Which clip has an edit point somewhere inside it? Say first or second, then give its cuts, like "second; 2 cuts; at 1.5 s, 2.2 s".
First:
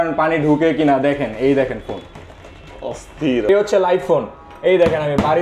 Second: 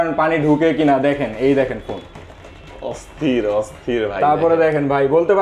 first; 1 cut; at 3.5 s